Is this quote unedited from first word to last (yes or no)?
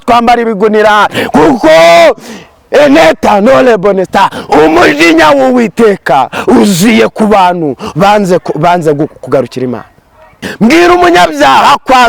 no